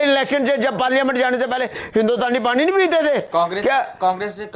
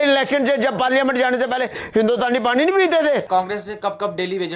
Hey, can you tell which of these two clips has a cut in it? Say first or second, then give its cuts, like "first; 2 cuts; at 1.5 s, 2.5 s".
second; 1 cut; at 3.2 s